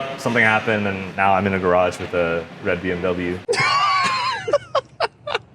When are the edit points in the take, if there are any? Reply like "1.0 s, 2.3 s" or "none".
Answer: 3.4 s